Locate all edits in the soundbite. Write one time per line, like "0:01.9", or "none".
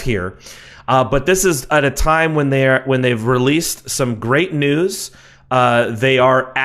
0:03.4